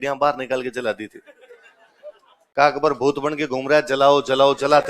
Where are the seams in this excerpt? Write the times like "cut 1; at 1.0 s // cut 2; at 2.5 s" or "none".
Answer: none

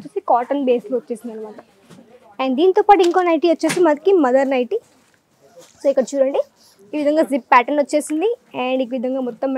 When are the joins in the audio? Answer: none

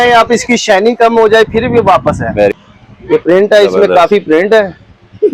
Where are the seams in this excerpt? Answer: cut 1; at 2.5 s

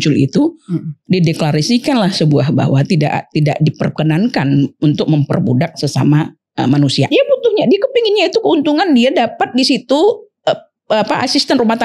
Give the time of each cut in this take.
cut 1; at 7.1 s

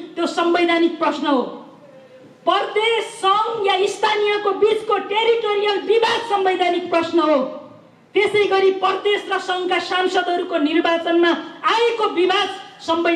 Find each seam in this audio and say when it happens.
none

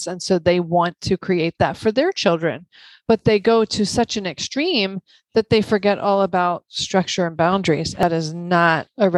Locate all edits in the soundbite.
cut 1; at 8.0 s

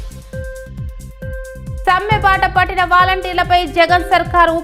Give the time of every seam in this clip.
none

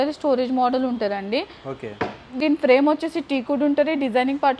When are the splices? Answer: none

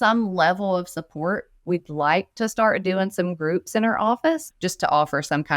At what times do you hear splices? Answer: cut 1; at 1.6 s // cut 2; at 4.5 s

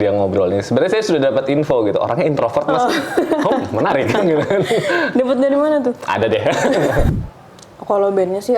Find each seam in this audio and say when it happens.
cut 1; at 7.1 s

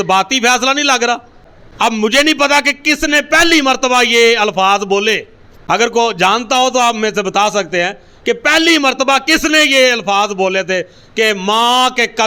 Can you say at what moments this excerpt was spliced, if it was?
none

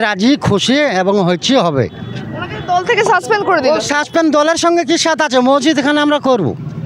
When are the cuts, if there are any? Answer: none

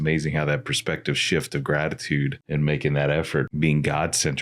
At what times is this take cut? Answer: cut 1; at 2.4 s // cut 2; at 3.5 s

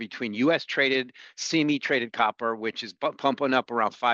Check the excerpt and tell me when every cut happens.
none

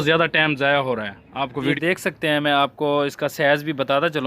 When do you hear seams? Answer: cut 1; at 1.7 s

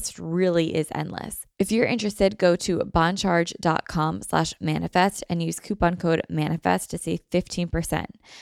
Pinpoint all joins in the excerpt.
cut 1; at 1.4 s

